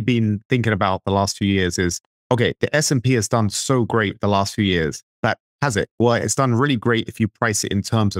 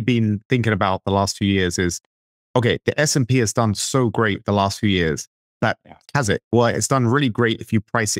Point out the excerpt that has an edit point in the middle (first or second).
first